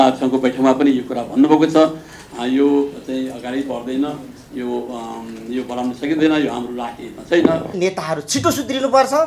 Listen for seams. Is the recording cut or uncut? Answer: cut